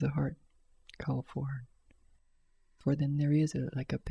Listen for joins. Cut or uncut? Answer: cut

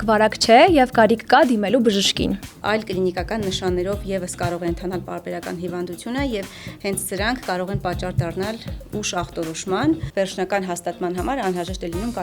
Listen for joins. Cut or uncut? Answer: cut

